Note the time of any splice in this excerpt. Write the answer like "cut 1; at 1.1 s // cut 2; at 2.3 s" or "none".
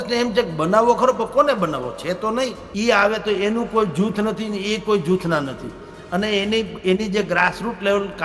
cut 1; at 2.6 s